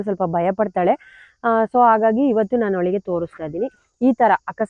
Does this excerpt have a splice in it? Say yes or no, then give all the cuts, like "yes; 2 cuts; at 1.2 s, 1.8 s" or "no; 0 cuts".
no; 0 cuts